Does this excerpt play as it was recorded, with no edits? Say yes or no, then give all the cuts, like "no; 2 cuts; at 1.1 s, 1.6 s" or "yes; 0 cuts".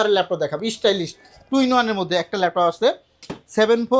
yes; 0 cuts